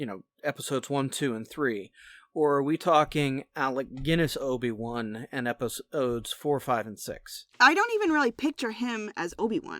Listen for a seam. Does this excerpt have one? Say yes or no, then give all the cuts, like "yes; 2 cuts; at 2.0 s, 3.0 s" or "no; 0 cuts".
yes; 1 cut; at 7.5 s